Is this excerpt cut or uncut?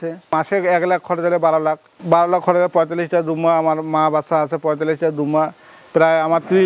uncut